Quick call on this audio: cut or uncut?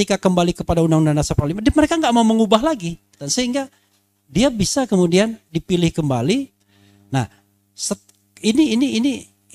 cut